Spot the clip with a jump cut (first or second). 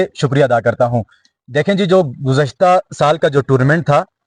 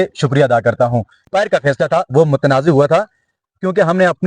second